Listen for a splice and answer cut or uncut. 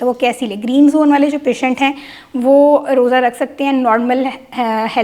uncut